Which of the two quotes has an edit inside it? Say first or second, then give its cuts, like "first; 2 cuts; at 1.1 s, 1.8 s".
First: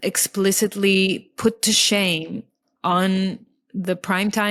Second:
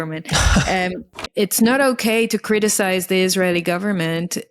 second; 1 cut; at 1.0 s